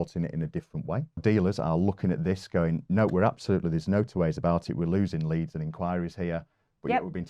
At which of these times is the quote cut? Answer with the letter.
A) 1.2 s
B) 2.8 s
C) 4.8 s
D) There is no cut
A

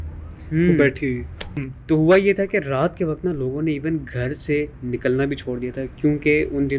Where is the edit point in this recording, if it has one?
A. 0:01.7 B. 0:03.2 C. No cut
A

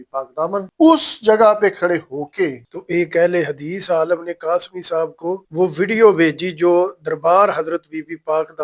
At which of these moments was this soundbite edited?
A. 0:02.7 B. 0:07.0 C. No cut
A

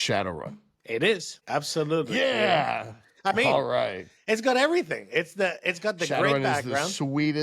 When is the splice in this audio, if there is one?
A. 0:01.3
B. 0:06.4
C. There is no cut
A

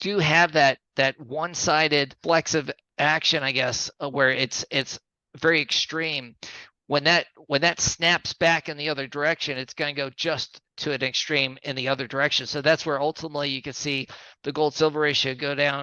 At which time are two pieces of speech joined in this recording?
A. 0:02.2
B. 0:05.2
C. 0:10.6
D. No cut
A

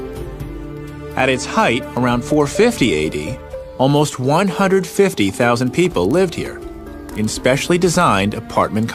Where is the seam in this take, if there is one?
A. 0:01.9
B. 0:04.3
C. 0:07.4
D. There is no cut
C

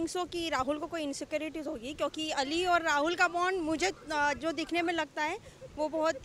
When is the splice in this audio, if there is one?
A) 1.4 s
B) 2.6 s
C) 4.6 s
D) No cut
D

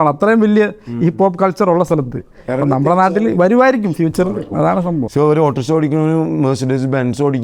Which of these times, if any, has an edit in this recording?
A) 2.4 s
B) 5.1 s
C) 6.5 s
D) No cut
B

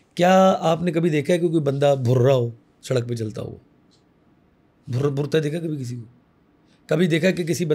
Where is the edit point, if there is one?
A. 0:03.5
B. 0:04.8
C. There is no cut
C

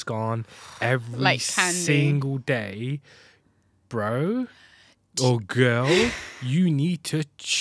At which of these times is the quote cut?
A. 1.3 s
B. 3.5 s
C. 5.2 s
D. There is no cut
D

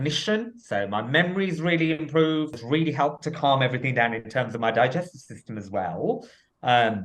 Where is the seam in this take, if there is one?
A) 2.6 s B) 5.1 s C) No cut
A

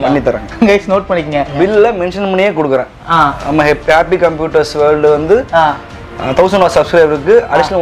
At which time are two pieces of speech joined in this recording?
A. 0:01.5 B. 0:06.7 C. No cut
A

